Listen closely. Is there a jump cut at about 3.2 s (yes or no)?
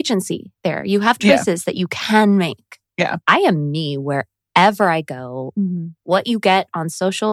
yes